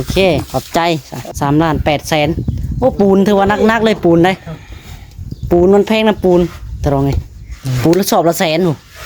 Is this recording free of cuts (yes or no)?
no